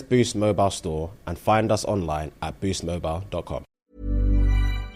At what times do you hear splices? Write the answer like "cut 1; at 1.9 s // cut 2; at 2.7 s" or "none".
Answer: cut 1; at 3.8 s